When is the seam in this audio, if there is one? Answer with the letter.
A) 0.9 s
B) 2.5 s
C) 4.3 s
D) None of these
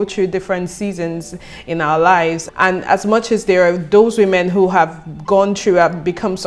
B